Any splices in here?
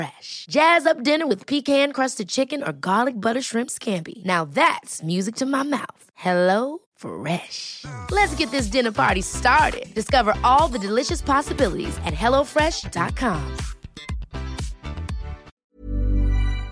yes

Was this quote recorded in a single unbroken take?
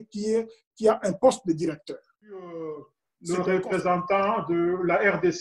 no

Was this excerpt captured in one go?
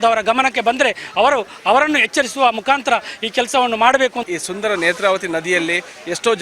no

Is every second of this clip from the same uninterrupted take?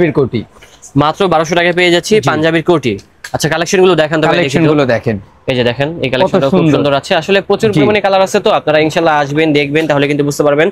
yes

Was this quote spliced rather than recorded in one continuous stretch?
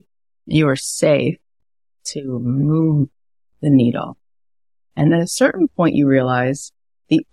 no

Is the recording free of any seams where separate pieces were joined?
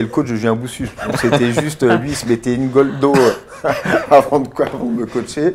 yes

